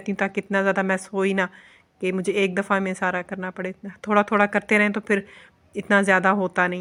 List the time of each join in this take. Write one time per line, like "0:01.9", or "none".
none